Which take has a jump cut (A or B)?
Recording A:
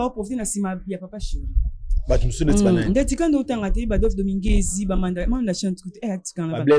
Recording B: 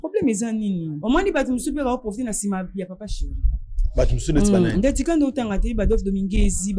B